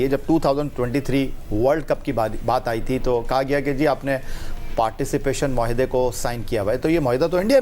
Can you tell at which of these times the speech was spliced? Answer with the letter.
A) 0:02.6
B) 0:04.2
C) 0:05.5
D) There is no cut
D